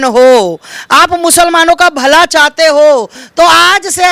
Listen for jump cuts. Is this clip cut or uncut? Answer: uncut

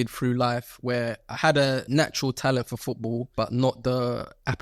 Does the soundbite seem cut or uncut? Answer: cut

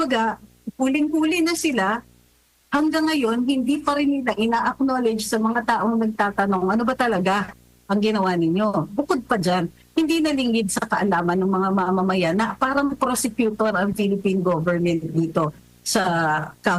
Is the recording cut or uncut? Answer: uncut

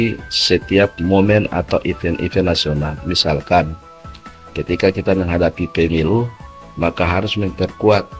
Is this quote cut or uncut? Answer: uncut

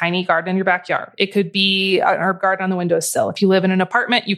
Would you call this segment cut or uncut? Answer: uncut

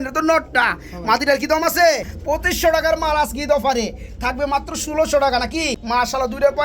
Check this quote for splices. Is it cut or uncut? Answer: cut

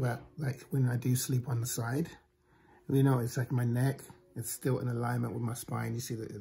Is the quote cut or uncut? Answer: uncut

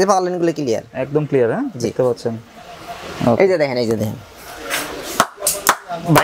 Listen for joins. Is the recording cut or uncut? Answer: uncut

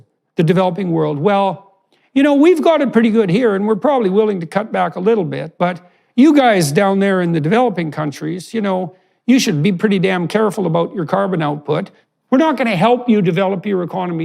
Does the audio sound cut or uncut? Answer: cut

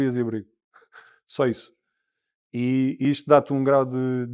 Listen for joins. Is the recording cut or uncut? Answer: uncut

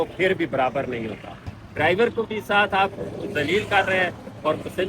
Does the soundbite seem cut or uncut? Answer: cut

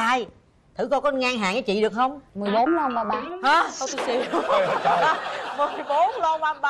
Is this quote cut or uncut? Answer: uncut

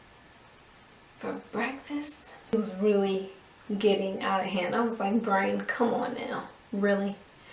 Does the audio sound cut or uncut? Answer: cut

